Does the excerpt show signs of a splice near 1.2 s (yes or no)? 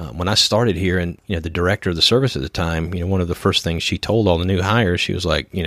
yes